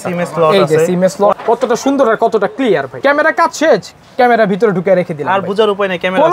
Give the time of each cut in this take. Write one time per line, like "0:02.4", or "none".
0:01.3
0:02.9